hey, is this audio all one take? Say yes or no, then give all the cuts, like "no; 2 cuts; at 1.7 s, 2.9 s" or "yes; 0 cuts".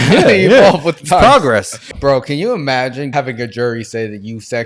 no; 2 cuts; at 1.8 s, 3.1 s